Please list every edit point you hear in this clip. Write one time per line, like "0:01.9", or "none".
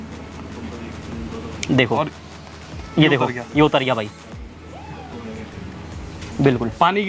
none